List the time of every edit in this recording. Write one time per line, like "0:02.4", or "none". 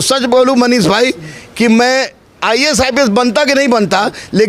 none